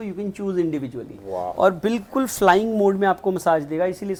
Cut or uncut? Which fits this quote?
uncut